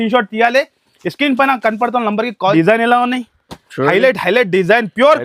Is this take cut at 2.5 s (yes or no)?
yes